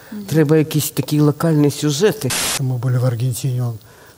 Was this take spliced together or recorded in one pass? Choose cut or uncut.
cut